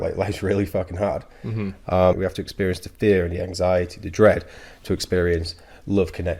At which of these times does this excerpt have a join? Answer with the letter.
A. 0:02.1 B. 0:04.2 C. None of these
A